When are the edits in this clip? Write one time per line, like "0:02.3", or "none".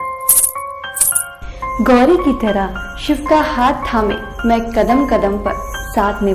none